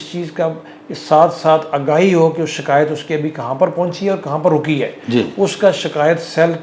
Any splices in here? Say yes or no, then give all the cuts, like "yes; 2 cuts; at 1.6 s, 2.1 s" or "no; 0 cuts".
no; 0 cuts